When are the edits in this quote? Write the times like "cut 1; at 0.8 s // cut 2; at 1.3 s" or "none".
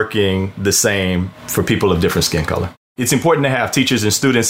cut 1; at 1.4 s // cut 2; at 3.0 s